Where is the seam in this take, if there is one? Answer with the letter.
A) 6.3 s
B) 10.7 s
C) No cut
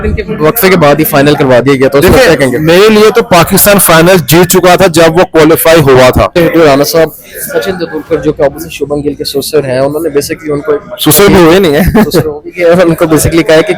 A